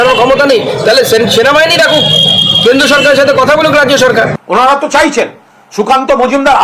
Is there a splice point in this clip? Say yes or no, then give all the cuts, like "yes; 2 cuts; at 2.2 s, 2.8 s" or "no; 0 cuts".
yes; 1 cut; at 4.4 s